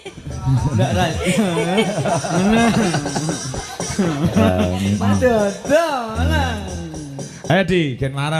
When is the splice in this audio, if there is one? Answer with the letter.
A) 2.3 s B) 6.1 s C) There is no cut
C